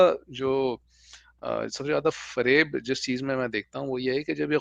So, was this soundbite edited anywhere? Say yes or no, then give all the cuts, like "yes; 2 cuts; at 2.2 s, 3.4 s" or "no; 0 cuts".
no; 0 cuts